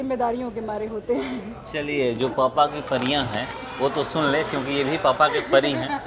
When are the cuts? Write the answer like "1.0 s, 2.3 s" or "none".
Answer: none